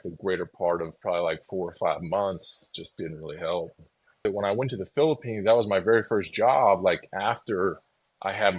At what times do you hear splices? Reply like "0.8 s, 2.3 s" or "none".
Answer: 4.2 s